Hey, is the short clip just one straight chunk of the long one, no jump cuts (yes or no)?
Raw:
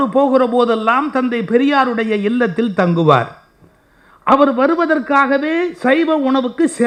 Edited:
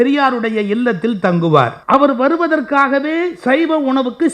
no